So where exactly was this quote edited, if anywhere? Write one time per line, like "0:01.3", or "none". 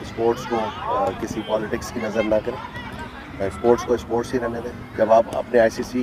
0:04.7